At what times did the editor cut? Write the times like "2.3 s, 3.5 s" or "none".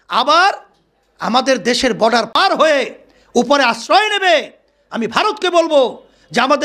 2.3 s